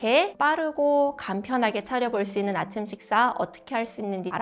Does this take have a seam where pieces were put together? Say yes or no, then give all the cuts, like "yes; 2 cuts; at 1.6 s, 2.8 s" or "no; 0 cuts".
no; 0 cuts